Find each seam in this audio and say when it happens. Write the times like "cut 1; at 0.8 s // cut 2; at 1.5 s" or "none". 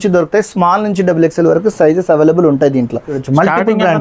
none